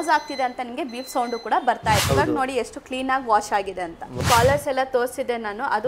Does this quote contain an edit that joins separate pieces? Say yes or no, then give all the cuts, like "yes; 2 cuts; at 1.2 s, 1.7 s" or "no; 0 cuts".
yes; 2 cuts; at 2.1 s, 4.2 s